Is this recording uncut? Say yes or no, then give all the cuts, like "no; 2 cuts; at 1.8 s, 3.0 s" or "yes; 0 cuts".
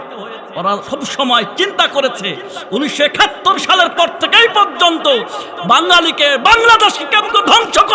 yes; 0 cuts